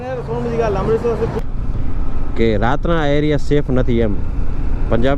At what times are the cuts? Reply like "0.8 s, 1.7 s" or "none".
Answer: 1.4 s